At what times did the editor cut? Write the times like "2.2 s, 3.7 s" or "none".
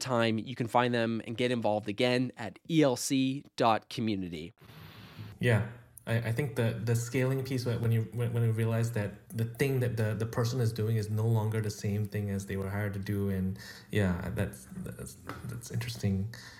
none